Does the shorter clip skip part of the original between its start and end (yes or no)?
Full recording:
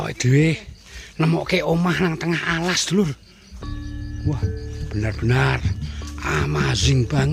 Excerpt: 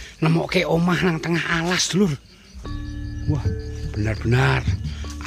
no